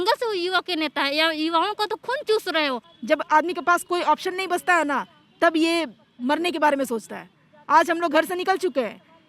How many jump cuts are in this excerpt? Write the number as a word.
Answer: one